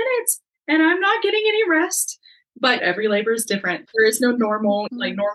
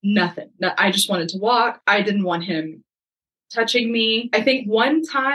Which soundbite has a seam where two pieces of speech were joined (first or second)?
first